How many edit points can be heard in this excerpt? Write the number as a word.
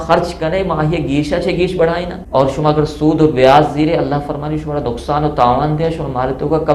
one